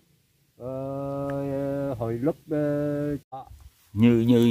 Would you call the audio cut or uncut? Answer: cut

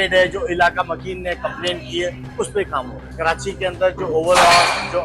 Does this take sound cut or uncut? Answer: cut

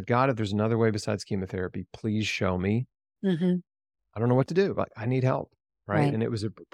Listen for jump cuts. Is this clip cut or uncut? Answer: uncut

